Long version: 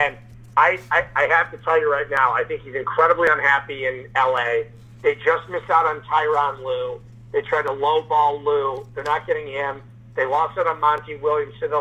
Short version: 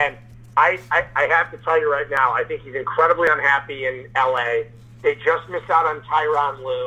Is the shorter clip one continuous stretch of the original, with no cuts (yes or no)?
yes